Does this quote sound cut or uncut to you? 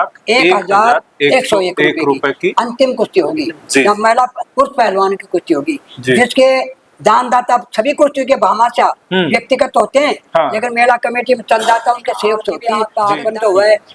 cut